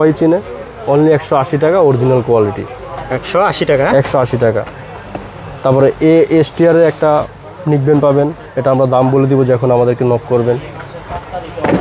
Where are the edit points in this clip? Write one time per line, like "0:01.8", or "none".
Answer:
none